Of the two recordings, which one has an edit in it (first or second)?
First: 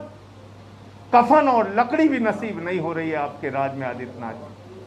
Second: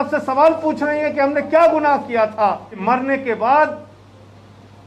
second